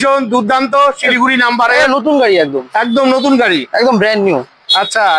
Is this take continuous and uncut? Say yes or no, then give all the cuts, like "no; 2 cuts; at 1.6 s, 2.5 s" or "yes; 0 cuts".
yes; 0 cuts